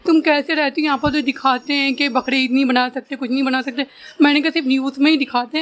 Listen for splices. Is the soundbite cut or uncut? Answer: uncut